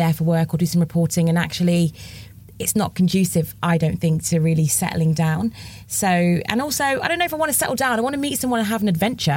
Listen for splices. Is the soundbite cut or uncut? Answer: uncut